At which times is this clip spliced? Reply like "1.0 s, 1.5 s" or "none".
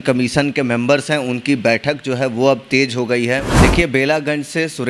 3.5 s